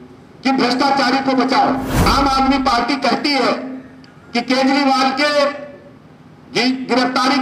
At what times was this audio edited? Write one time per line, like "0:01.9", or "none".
0:01.9